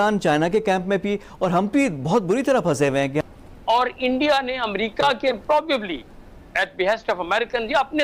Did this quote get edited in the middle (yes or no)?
no